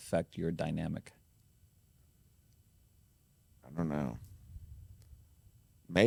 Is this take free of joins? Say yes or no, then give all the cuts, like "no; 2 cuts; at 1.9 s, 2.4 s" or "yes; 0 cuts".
yes; 0 cuts